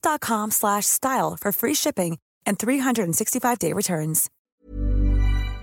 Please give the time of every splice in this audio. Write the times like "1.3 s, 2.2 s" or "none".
4.3 s